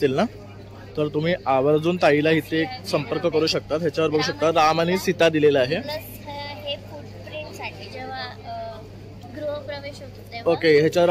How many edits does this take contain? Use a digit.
0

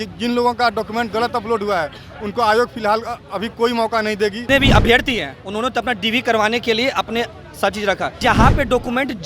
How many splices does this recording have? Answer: 2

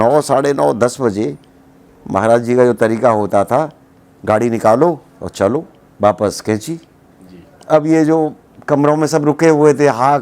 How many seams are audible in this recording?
1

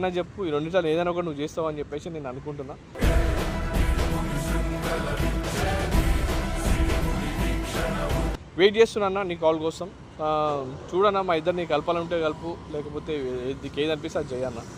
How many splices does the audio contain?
0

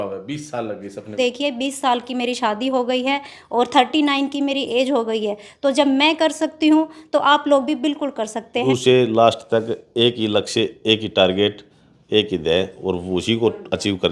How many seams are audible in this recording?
2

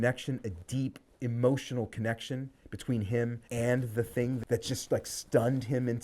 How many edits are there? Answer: 1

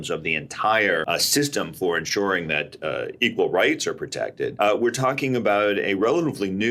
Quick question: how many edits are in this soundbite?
2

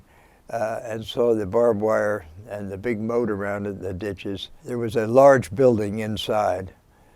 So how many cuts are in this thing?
1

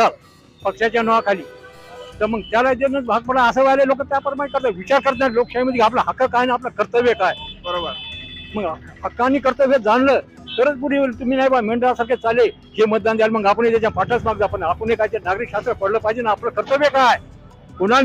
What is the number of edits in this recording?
0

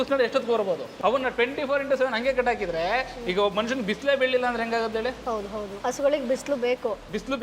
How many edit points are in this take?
2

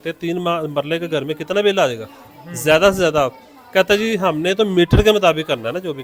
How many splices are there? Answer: 0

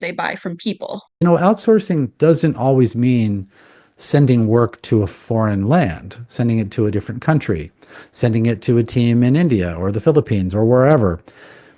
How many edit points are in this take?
1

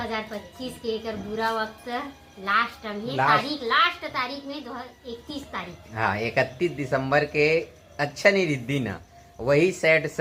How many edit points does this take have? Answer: 0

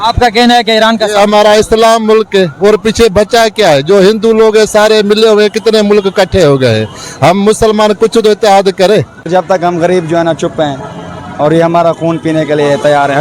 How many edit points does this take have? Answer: 1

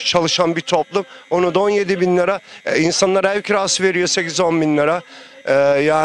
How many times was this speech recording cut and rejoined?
0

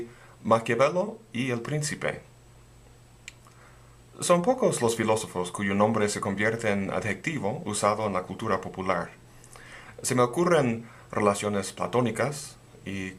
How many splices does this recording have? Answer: 1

